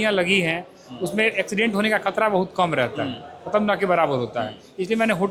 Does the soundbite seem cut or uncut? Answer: uncut